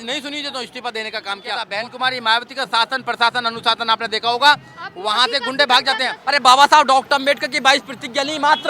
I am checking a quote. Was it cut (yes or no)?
yes